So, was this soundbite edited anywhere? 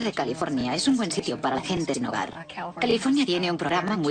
yes; 1 cut; at 1.3 s

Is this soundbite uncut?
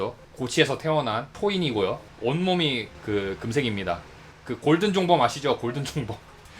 no; 2 cuts; at 1.3 s, 2.1 s

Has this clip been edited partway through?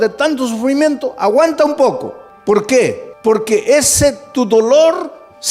yes; 1 cut; at 2.2 s

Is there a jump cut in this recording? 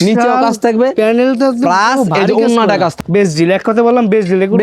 yes; 1 cut; at 2.9 s

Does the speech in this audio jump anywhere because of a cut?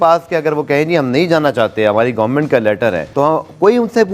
no; 0 cuts

